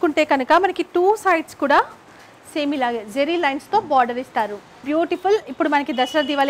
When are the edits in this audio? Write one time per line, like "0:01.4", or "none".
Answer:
0:04.8